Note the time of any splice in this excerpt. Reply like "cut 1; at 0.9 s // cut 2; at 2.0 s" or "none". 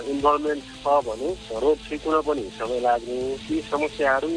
cut 1; at 3.4 s